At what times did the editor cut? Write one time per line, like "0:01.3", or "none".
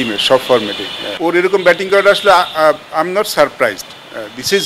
0:01.1